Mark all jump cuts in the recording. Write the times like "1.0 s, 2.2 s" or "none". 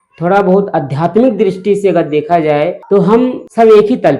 2.9 s